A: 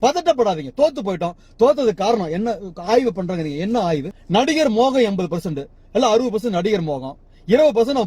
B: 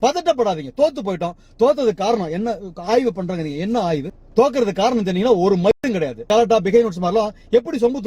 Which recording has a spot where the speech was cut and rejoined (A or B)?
B